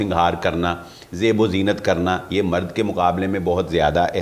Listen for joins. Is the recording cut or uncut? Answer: uncut